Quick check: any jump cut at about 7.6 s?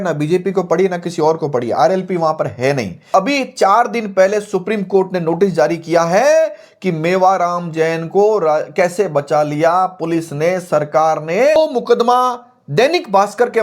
no; 2 cuts; at 3.1 s, 11.6 s

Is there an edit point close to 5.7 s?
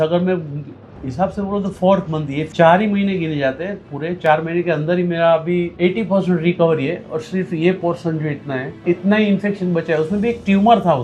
yes; 3 cuts; at 2.5 s, 5.7 s, 8.7 s

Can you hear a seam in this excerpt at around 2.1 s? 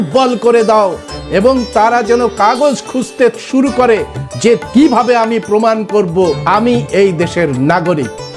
no; 2 cuts; at 4.6 s, 6.4 s

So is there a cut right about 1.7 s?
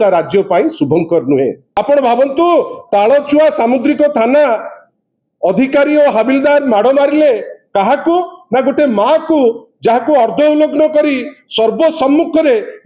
yes; 1 cut; at 1.7 s

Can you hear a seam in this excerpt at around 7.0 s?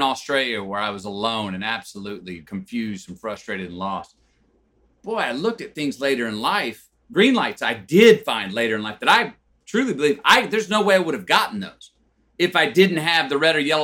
yes; 1 cut; at 7.0 s

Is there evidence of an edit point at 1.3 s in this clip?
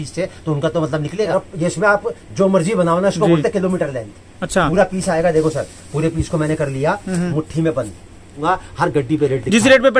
yes; 2 cuts; at 1.3 s, 8.4 s

